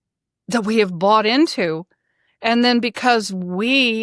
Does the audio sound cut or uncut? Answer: uncut